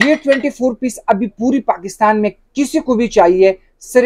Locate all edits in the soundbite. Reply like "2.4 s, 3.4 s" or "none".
none